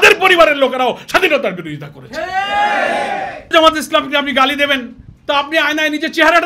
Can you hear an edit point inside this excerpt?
yes; 1 cut; at 3.5 s

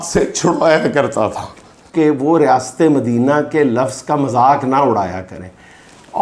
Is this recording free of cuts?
no; 1 cut; at 1.9 s

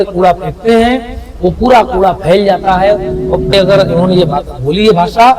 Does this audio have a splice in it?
yes; 1 cut; at 3.5 s

